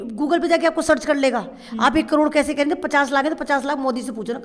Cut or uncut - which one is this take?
uncut